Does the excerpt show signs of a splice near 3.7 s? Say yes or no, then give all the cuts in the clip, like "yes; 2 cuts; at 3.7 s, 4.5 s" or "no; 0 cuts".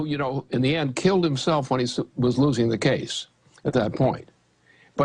no; 0 cuts